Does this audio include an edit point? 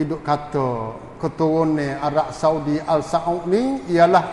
no; 0 cuts

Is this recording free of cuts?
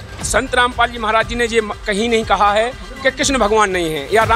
yes; 0 cuts

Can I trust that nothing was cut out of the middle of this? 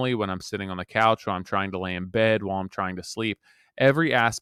yes; 0 cuts

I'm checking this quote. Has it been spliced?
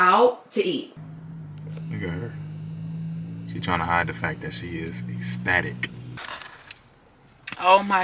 yes; 2 cuts; at 0.9 s, 6.2 s

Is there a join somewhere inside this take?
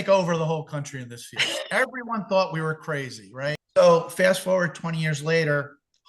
yes; 1 cut; at 3.6 s

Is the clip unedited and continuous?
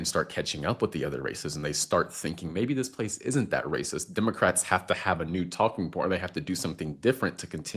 yes; 0 cuts

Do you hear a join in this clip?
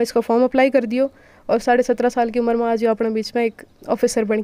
no; 0 cuts

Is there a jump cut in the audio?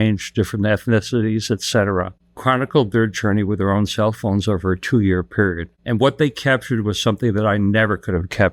no; 0 cuts

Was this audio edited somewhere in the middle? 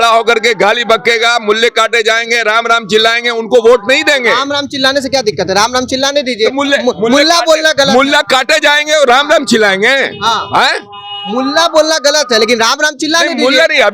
no; 0 cuts

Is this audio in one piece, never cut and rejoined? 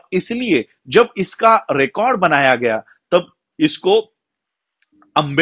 yes; 0 cuts

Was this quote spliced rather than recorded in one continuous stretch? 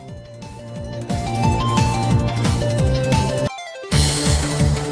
no; 0 cuts

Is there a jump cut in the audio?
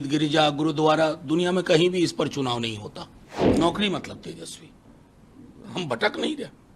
yes; 1 cut; at 3.5 s

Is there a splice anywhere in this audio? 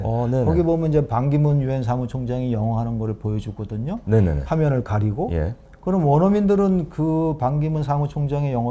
no; 0 cuts

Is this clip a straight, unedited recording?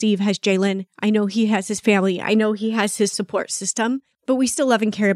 no; 1 cut; at 4.1 s

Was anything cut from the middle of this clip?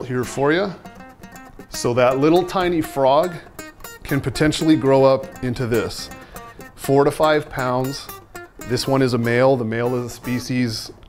yes; 1 cut; at 1.7 s

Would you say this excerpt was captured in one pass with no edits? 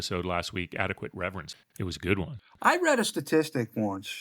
no; 1 cut; at 1.5 s

